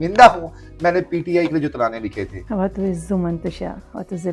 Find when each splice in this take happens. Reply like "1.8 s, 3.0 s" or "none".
2.3 s